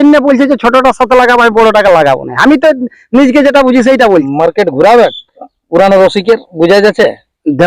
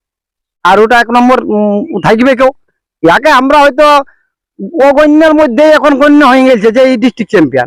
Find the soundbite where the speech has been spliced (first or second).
first